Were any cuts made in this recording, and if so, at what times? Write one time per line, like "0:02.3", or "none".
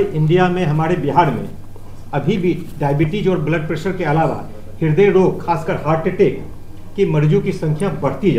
none